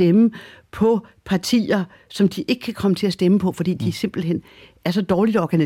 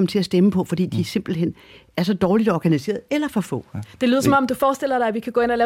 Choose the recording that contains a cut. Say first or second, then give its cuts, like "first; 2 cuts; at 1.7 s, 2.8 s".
second; 1 cut; at 4.5 s